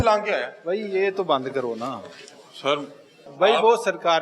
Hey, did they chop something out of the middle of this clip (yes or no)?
yes